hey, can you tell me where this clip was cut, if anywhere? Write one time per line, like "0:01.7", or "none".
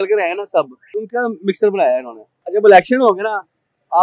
0:01.0
0:02.5